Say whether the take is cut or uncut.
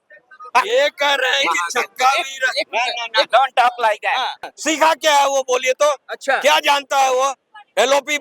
cut